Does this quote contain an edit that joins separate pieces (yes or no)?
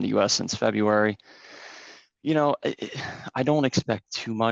no